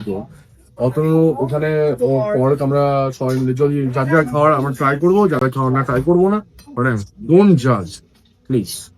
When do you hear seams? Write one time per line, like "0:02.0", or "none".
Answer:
none